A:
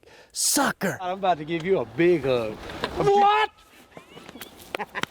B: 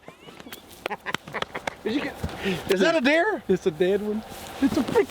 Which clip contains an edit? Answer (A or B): A